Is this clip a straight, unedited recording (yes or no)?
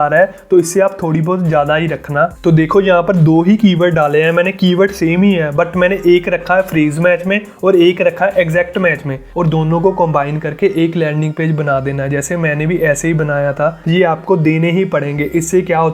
no